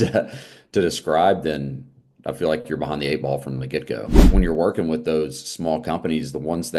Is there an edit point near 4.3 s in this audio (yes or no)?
yes